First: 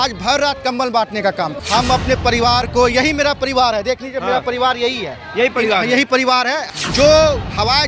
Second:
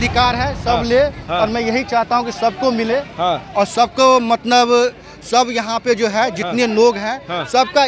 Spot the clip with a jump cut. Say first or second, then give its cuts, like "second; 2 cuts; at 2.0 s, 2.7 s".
first; 2 cuts; at 1.6 s, 6.7 s